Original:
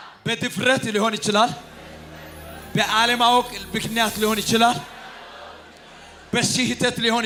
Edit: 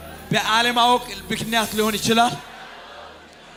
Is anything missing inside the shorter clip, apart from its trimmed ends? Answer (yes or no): no